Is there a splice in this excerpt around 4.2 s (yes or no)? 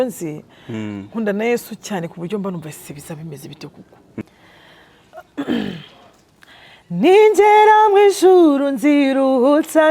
yes